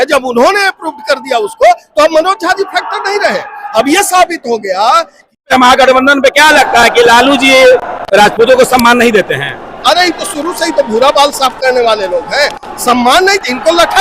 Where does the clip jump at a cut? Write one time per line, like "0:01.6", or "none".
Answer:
0:05.4